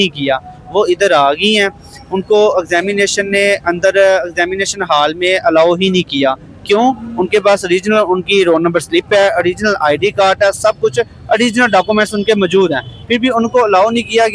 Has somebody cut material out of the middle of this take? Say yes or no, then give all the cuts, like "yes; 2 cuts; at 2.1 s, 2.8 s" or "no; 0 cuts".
no; 0 cuts